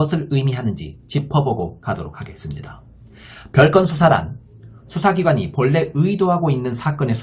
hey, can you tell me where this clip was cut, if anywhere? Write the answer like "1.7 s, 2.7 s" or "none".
none

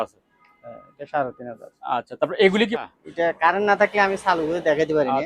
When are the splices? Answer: 2.7 s

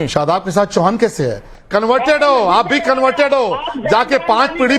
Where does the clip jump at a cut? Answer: 1.5 s

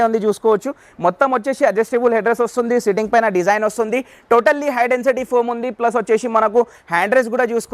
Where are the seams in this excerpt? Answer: none

